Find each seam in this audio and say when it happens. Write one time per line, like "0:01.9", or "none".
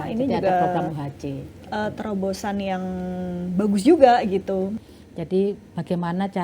0:04.8